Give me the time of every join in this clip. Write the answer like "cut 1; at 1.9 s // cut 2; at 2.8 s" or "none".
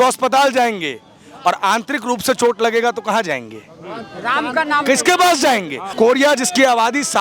cut 1; at 5.8 s